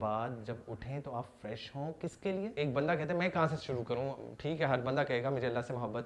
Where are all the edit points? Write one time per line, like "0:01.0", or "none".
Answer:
0:02.5